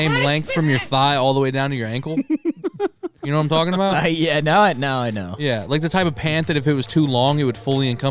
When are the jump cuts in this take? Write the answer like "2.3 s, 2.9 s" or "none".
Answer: none